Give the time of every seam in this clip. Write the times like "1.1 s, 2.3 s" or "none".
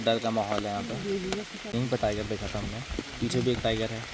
1.7 s